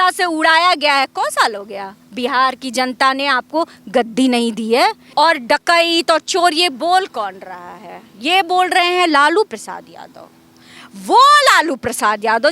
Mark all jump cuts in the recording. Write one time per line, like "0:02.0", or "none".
0:05.0